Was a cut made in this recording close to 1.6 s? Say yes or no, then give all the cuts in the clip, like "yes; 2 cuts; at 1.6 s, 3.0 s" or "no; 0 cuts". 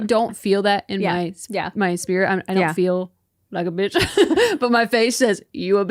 no; 0 cuts